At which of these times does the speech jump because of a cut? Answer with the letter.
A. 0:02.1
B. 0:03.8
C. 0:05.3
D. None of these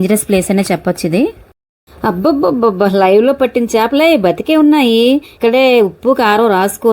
C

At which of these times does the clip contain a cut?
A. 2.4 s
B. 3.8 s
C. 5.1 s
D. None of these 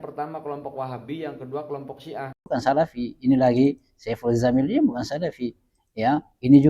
A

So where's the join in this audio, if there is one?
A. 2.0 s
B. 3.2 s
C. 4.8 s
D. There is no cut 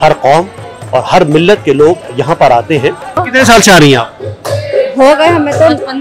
B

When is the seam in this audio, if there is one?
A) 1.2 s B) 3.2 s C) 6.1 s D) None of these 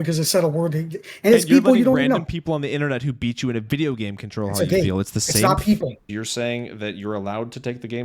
C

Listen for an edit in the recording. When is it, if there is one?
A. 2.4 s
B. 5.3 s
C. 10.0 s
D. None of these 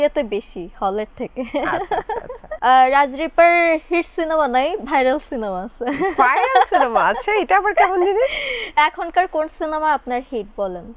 A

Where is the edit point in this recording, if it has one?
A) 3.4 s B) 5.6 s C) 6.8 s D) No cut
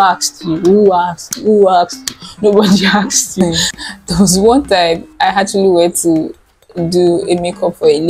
A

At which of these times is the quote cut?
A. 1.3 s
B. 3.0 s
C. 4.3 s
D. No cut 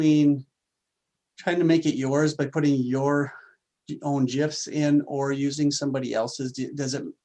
D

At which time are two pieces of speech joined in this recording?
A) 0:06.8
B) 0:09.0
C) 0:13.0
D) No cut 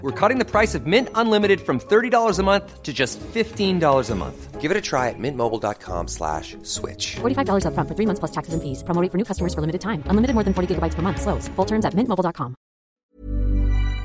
C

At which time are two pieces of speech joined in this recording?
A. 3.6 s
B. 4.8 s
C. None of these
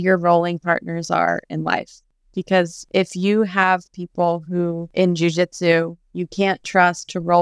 B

